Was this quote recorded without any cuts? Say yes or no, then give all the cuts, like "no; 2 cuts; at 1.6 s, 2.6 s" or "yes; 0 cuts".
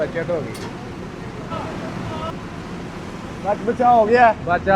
no; 1 cut; at 2.3 s